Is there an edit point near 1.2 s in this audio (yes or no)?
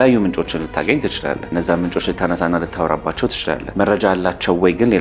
no